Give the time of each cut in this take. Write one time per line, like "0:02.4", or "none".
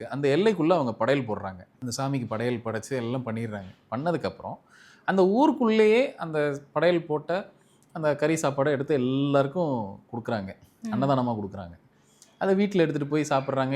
0:01.7